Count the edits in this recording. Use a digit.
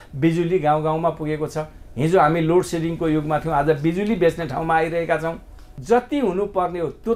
1